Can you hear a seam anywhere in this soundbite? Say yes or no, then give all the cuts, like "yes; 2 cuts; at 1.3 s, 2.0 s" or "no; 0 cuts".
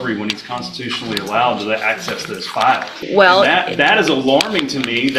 yes; 1 cut; at 2.9 s